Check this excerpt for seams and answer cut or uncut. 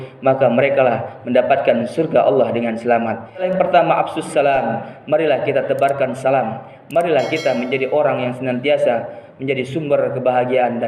cut